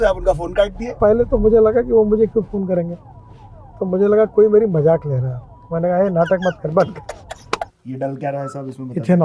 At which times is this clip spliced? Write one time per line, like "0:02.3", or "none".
0:01.0
0:07.7